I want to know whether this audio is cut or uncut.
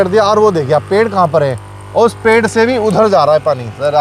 uncut